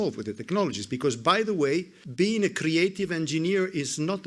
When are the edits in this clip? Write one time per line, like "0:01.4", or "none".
0:02.0